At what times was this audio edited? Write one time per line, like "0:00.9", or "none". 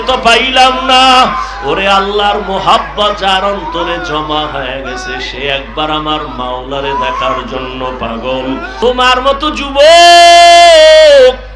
0:08.7